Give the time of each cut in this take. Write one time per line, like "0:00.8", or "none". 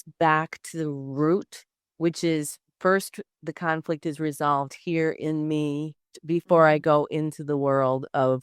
0:06.1